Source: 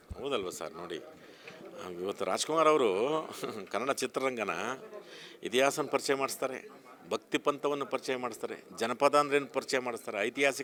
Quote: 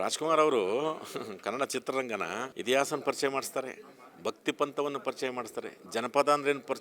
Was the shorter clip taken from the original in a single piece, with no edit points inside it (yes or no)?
no